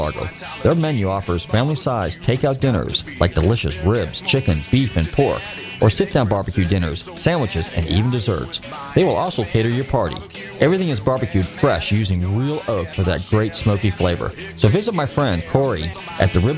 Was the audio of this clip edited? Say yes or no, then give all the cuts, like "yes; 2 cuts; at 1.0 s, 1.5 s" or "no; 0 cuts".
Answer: yes; 1 cut; at 15.6 s